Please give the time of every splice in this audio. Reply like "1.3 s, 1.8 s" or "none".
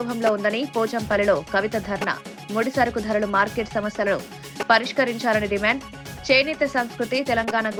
none

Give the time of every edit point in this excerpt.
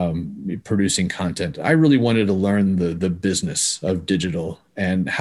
none

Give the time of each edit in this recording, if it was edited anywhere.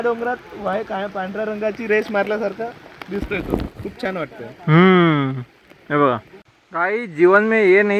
6.6 s

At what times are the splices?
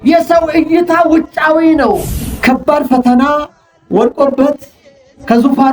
2.1 s

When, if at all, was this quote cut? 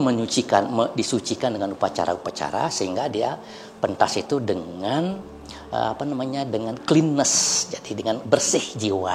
none

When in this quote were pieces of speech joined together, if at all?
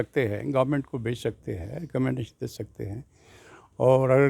none

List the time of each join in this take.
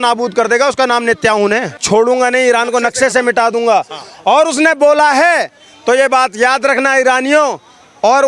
1.8 s

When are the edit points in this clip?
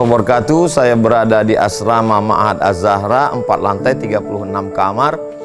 none

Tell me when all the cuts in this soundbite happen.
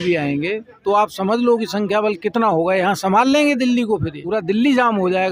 4.2 s

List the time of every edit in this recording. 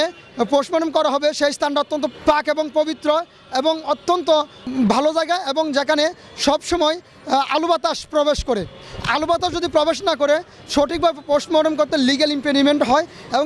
none

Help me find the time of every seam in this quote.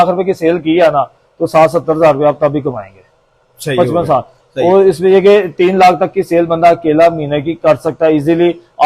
none

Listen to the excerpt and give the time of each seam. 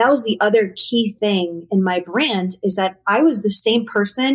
none

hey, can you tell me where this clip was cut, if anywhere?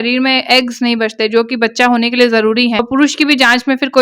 none

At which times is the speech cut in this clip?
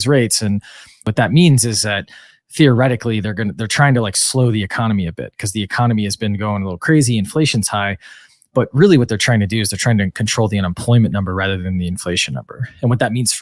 1.1 s

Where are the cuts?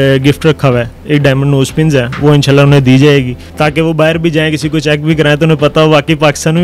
1.0 s, 3.4 s

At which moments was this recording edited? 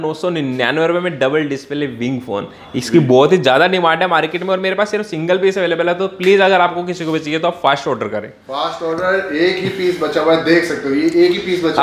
none

